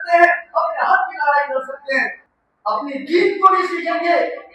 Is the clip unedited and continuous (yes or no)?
no